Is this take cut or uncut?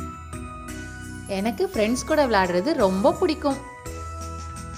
cut